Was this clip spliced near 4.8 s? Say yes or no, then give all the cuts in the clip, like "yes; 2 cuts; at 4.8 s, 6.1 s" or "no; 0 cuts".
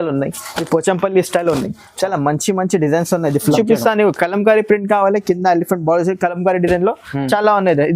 no; 1 cut; at 3.5 s